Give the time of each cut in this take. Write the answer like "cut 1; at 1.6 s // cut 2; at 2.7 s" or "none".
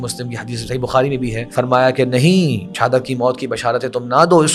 cut 1; at 1.4 s // cut 2; at 2.7 s